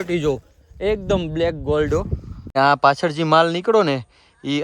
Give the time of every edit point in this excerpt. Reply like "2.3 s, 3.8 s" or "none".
2.5 s